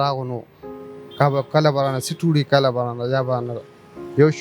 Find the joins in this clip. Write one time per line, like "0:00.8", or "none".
none